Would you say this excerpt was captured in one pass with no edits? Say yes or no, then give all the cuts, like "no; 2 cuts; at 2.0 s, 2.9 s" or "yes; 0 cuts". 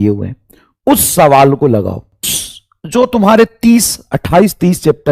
no; 1 cut; at 2.3 s